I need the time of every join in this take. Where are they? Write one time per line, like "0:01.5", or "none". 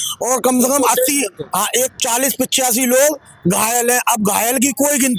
0:01.9